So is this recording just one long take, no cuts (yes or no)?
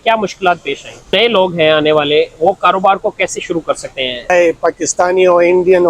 no